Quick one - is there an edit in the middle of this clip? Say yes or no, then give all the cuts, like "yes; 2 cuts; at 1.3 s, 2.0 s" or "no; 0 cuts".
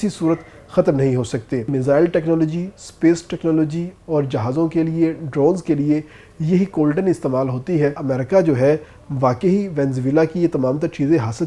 yes; 2 cuts; at 1.7 s, 8.0 s